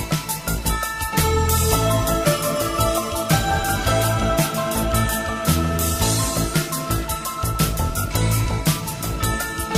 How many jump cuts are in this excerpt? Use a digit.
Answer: 0